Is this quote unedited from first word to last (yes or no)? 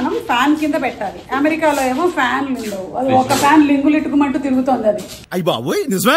no